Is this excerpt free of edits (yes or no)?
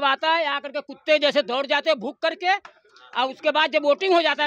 yes